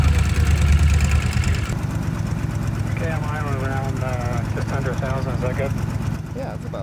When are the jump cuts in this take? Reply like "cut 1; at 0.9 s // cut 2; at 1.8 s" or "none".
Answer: cut 1; at 1.7 s